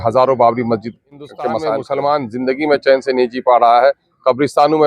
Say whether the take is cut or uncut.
cut